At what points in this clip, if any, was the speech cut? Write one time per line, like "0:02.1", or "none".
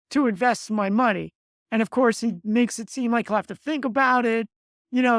none